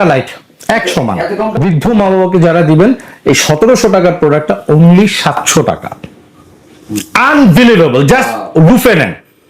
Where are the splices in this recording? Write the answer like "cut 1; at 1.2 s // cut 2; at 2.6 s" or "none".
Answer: cut 1; at 1.5 s